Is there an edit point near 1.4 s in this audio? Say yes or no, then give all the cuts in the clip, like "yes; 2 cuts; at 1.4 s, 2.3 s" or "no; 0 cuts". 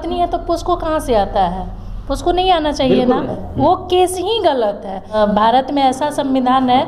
no; 2 cuts; at 3.4 s, 5.1 s